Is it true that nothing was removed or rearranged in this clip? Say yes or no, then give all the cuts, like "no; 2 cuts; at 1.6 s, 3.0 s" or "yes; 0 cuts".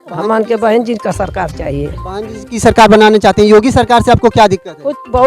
yes; 0 cuts